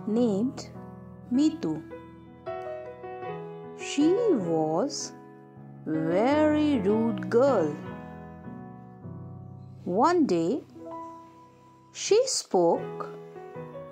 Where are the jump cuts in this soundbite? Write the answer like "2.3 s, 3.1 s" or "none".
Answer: 2.3 s, 3.7 s